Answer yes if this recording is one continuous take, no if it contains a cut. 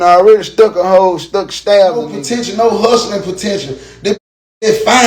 no